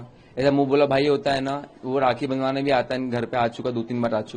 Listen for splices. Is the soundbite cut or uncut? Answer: uncut